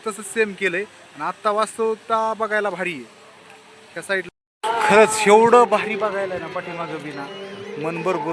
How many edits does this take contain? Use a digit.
1